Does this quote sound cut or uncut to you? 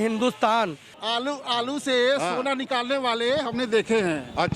cut